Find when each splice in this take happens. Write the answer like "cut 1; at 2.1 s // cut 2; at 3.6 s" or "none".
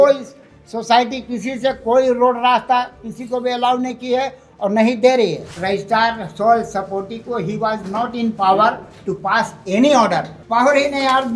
cut 1; at 5.5 s // cut 2; at 10.4 s